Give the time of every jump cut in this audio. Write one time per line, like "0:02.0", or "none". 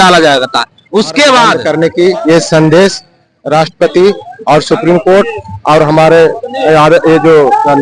0:01.6